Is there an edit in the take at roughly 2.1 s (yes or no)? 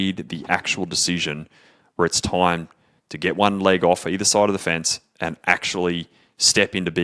no